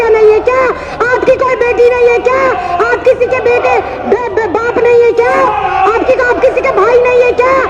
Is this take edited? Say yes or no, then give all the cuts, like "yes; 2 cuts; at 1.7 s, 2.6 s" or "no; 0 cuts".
no; 0 cuts